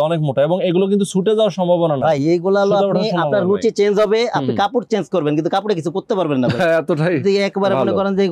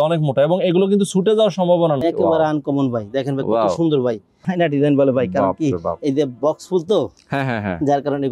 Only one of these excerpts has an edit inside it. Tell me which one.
second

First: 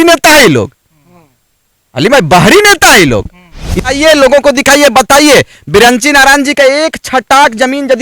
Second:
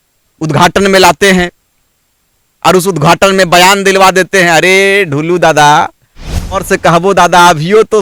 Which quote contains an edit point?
first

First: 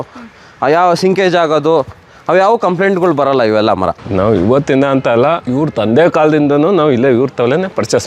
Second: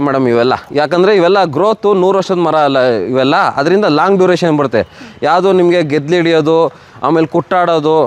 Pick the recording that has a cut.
first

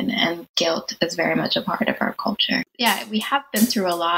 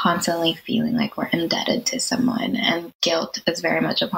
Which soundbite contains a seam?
first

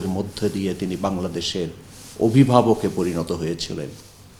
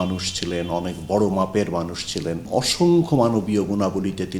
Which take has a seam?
second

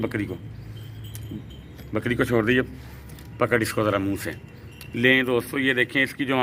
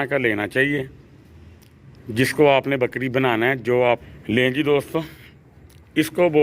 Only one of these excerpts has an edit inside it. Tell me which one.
second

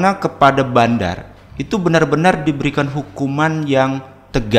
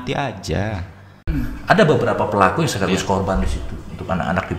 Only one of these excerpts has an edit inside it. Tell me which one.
second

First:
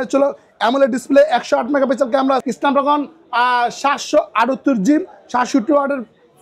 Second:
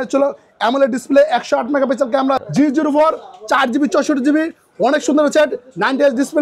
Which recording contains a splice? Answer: second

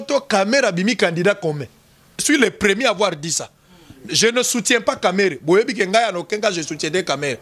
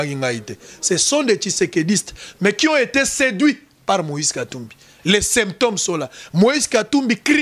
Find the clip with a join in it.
first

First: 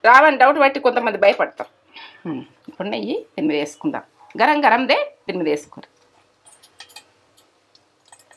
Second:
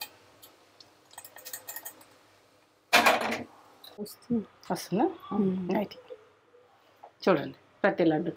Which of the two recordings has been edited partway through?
second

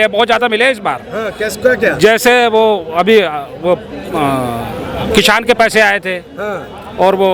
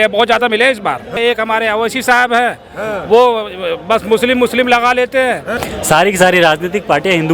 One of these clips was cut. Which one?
second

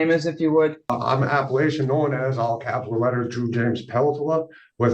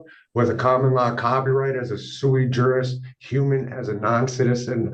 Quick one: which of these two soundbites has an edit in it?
first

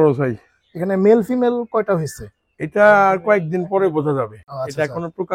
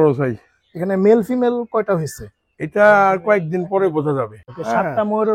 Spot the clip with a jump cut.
second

